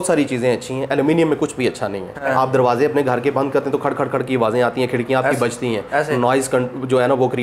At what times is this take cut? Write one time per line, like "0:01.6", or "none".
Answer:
0:02.1

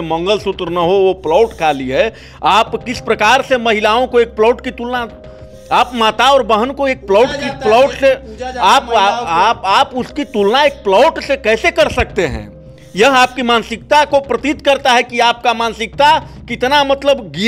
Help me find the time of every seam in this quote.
none

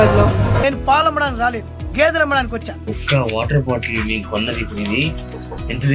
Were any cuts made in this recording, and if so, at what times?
0:02.7

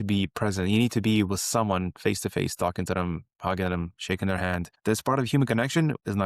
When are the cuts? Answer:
0:03.9

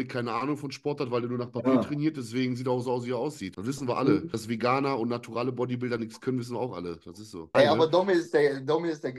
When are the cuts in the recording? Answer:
0:03.5
0:04.3
0:07.5

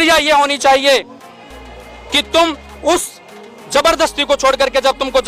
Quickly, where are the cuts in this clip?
none

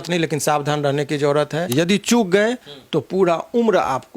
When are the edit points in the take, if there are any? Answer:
0:01.7

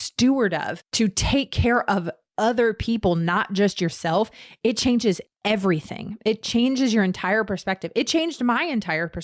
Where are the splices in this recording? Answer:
none

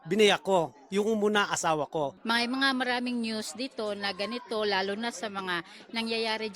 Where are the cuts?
0:02.2

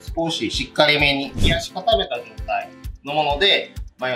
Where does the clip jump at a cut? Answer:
0:01.4

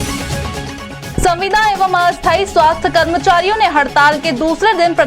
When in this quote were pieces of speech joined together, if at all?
0:01.0

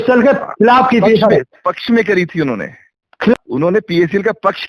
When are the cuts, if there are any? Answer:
0:03.3

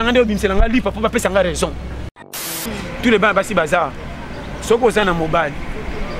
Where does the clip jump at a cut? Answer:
0:02.4

